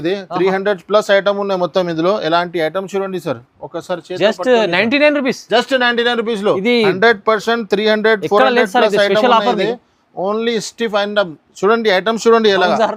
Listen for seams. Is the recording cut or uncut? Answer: uncut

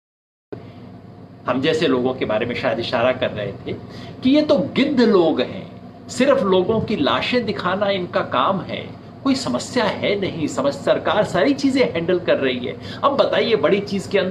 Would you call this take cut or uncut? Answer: uncut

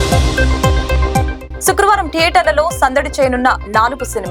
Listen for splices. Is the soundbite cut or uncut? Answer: uncut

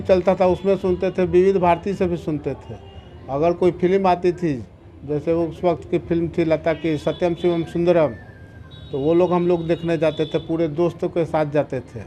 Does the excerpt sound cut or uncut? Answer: uncut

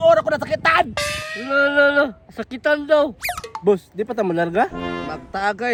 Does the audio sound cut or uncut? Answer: uncut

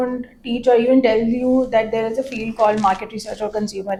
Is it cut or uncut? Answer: uncut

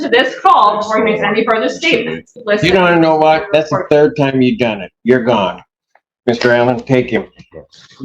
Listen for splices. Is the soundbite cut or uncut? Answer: cut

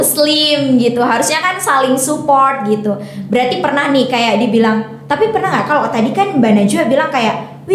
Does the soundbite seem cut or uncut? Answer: uncut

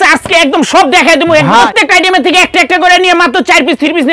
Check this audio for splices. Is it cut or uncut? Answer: cut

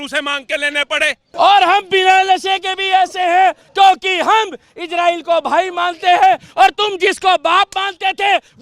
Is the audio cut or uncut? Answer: cut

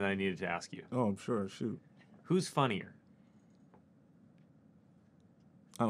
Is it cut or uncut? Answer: uncut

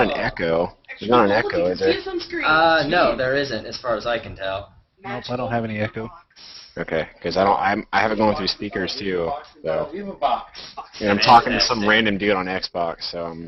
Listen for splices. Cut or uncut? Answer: uncut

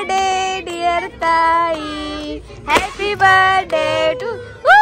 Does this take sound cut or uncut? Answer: uncut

